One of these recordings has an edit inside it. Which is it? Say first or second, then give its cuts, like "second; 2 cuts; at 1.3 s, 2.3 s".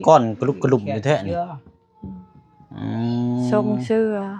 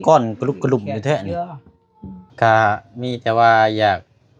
second; 1 cut; at 2.3 s